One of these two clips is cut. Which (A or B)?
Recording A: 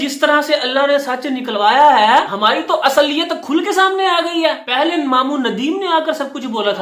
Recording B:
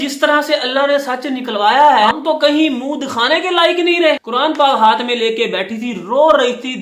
B